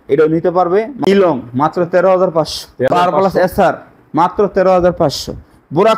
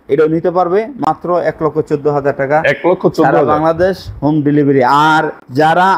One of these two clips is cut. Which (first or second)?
first